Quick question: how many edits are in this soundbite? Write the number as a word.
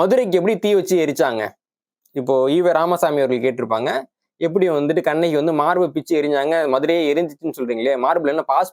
zero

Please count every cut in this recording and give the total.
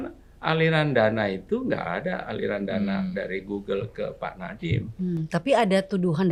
zero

